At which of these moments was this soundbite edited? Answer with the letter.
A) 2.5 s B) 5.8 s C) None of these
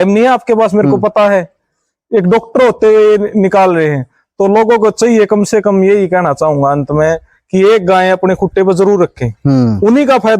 C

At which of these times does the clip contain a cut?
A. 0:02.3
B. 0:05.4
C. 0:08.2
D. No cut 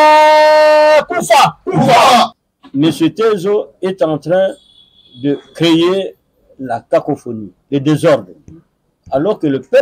A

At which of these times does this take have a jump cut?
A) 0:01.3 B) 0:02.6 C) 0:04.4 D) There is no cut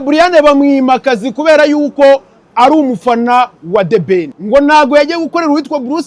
C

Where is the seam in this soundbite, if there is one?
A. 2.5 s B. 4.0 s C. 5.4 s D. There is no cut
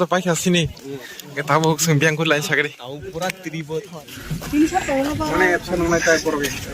B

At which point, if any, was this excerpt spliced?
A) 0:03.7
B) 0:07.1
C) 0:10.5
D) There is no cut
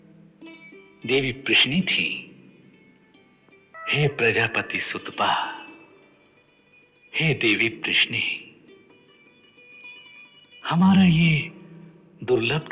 A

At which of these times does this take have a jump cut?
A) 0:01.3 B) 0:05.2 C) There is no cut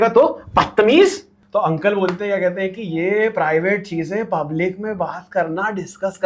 A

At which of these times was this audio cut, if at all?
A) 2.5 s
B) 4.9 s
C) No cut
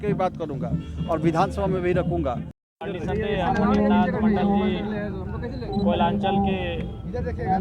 A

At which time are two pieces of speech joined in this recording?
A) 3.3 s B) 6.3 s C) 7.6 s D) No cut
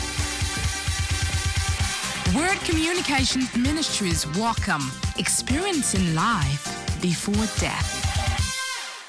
D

